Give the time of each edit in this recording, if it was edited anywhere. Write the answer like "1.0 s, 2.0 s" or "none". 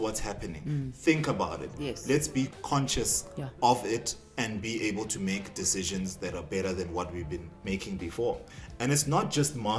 2.5 s, 7.5 s, 8.4 s